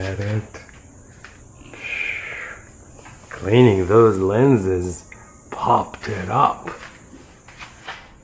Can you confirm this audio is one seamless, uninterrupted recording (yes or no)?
yes